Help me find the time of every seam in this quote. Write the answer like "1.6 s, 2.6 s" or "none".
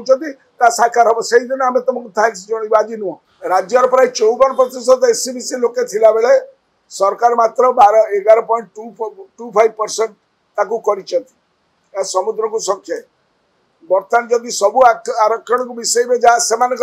3.3 s